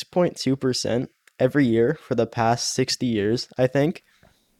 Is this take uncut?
yes; 0 cuts

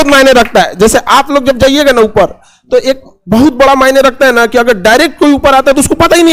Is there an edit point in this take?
no; 0 cuts

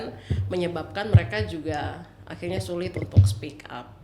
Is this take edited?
no; 0 cuts

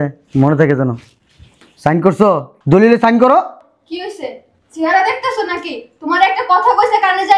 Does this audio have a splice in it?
yes; 1 cut; at 2.5 s

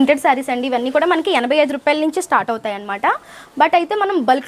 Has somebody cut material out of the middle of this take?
no; 0 cuts

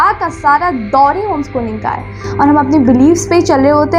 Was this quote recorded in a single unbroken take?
no; 1 cut; at 2.2 s

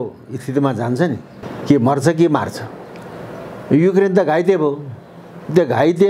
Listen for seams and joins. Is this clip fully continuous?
no; 1 cut; at 1.5 s

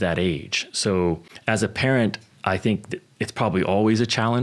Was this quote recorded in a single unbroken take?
no; 1 cut; at 1.3 s

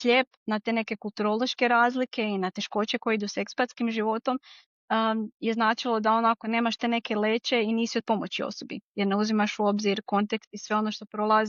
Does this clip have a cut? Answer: no; 0 cuts

